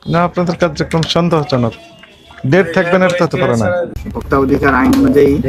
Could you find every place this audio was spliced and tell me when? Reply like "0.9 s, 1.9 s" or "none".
4.0 s